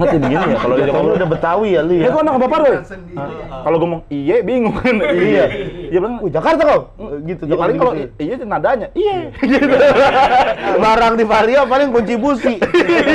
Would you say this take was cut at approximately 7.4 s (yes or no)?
no